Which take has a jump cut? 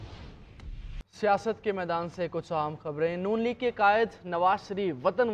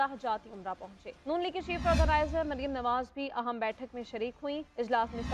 first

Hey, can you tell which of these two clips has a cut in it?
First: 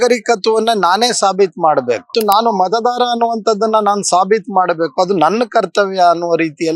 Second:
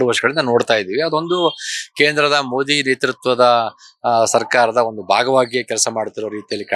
first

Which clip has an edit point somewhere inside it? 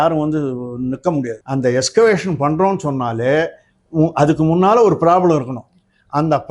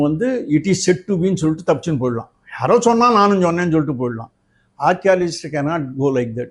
first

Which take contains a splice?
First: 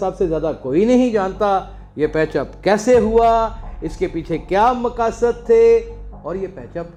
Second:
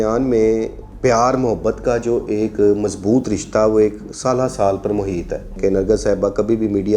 second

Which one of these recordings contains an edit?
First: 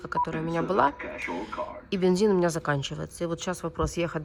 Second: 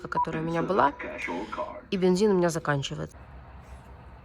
second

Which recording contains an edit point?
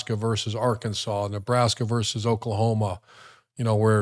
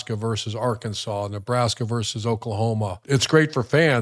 second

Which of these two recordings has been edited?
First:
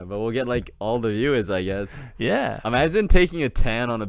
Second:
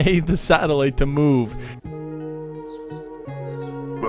second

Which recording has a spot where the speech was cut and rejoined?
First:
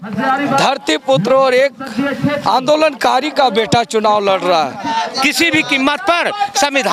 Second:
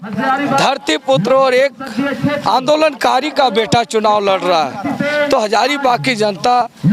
first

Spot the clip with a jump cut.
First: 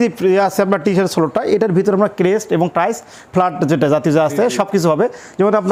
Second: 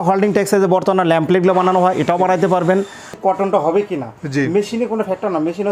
second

